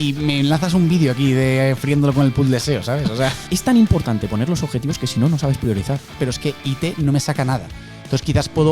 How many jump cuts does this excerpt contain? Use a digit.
2